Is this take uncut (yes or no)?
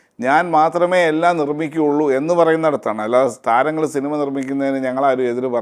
yes